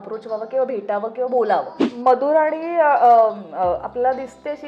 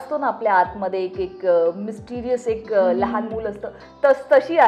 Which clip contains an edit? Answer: first; 1 cut; at 1.9 s

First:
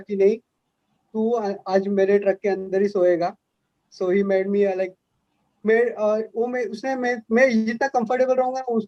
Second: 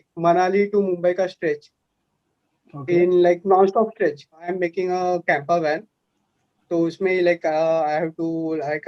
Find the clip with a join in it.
second; 1 cut; at 4.5 s

